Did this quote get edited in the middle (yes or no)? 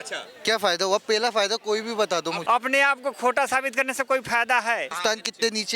yes